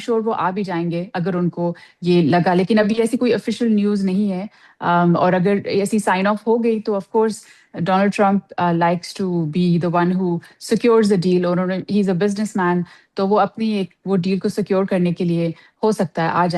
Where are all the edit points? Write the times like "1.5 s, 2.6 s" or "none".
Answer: none